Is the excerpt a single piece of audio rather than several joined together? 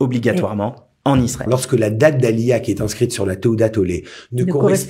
no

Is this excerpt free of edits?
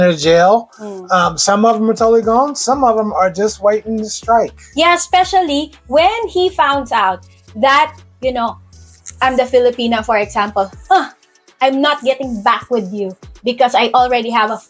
yes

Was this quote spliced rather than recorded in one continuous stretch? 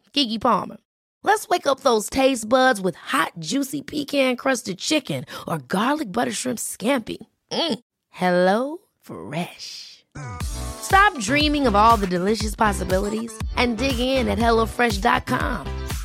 no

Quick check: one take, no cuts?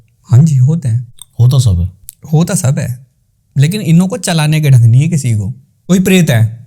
no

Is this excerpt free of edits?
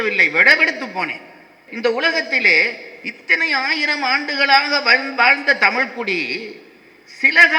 no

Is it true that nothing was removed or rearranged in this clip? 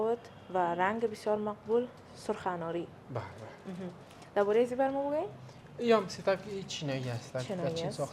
yes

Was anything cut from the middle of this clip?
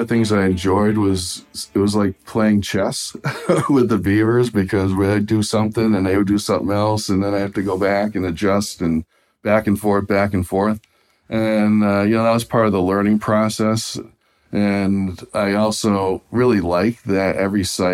no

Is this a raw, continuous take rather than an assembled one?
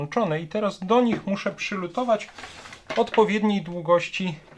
yes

